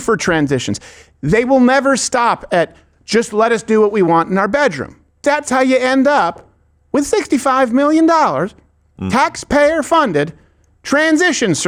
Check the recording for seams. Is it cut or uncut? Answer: uncut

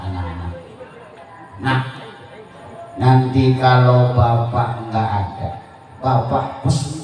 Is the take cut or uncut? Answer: uncut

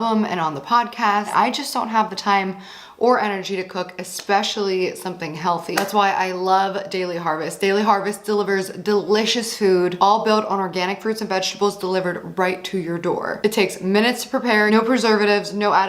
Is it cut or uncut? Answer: cut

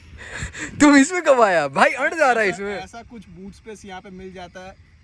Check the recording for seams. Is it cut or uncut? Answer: uncut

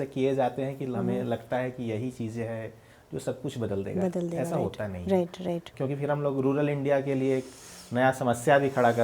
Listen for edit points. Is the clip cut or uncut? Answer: cut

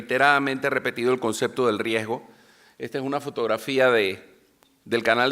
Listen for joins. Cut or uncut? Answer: cut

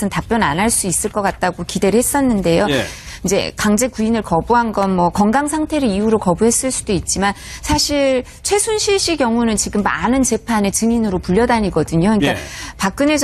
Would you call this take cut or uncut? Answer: uncut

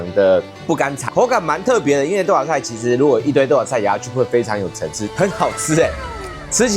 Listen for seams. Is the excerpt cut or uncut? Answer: cut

